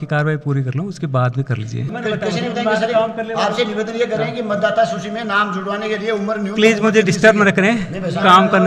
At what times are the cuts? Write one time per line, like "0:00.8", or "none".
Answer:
none